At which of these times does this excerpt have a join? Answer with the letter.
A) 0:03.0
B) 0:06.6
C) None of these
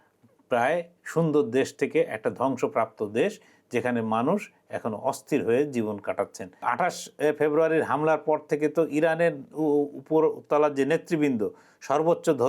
B